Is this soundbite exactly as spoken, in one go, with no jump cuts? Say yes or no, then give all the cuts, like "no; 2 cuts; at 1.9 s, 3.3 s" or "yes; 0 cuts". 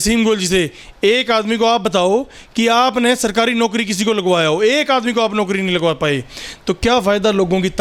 yes; 0 cuts